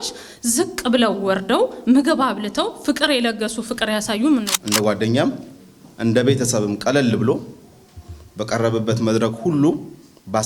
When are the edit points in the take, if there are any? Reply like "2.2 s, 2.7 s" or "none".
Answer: 4.5 s